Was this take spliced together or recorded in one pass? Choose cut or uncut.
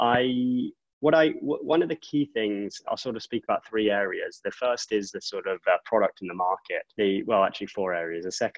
cut